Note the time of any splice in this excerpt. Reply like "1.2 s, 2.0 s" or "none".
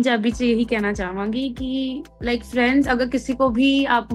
2.1 s